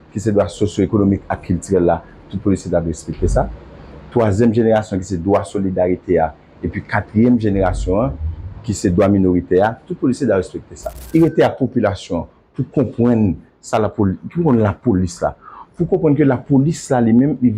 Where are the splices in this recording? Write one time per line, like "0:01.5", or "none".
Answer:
0:11.0